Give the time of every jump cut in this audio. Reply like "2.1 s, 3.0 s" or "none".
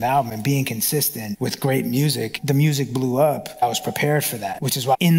none

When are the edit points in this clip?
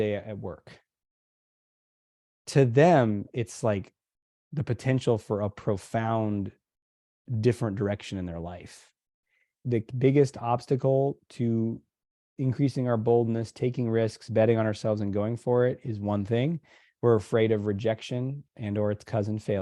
9.6 s

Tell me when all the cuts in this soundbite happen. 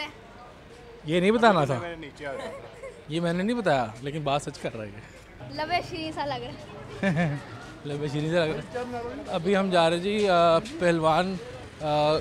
none

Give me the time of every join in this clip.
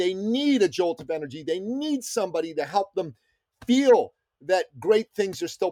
none

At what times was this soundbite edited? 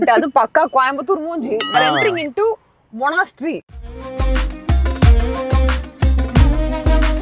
1.7 s, 4.1 s

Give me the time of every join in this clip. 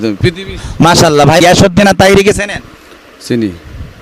1.4 s

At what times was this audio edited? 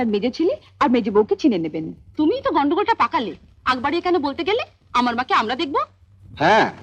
none

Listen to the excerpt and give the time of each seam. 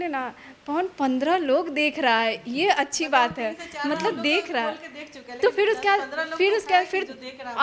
none

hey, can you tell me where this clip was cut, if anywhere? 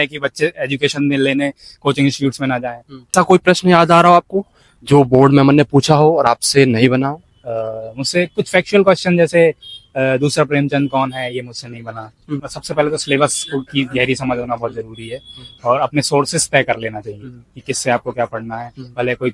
2.9 s, 12.6 s

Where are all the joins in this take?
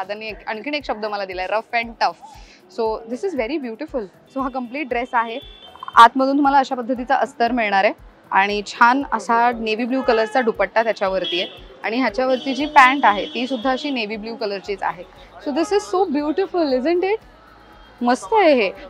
4.2 s, 5.5 s

